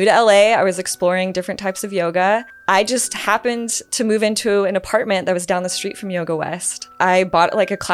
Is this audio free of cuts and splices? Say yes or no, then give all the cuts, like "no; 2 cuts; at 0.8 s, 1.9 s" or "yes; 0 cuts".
no; 2 cuts; at 2.5 s, 6.9 s